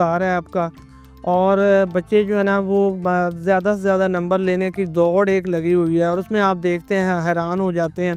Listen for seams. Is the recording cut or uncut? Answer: uncut